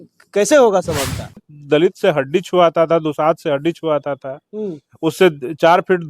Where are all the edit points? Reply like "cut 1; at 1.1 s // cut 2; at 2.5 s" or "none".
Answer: cut 1; at 1.5 s